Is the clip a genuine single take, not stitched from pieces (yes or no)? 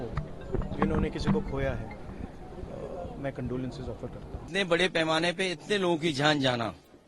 no